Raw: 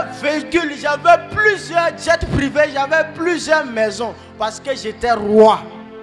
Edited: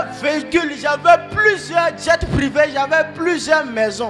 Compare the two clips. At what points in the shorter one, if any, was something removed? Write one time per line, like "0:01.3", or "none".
none

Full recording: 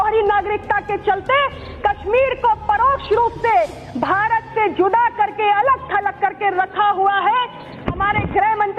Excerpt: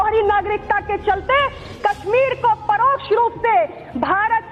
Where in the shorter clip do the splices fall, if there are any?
none

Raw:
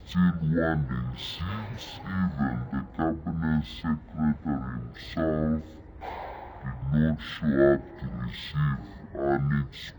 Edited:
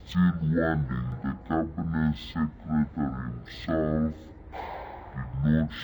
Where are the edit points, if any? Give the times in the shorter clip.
0:01.1

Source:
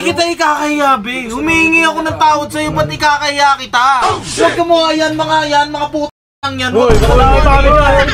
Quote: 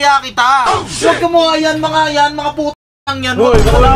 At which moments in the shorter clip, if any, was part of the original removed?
none

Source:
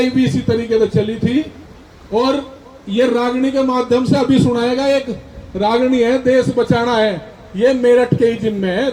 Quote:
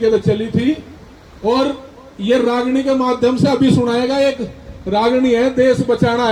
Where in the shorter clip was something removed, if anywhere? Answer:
none

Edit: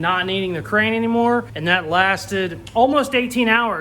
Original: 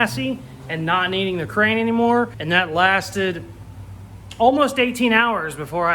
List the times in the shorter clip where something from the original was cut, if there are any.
0:02.6

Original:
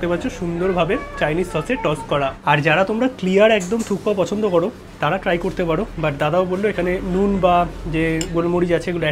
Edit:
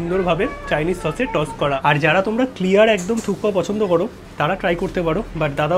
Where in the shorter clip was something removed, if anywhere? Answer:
0:01.8

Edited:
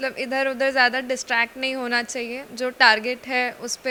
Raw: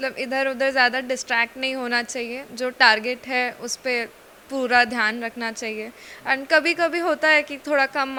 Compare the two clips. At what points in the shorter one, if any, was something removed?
none

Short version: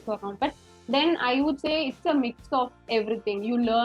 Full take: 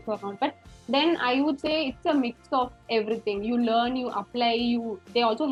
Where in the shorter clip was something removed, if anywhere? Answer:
none

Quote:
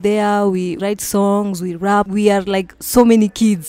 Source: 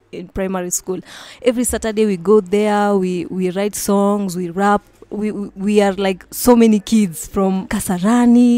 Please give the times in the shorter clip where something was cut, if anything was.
0:00.8
0:02.1

